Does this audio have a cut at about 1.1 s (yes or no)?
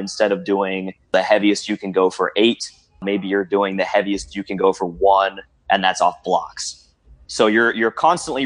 yes